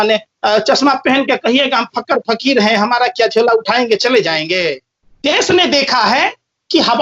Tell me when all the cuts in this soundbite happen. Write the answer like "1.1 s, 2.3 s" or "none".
4.8 s